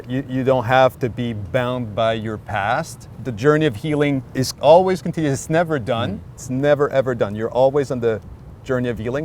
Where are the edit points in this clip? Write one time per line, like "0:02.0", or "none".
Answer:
0:03.1
0:04.5
0:06.4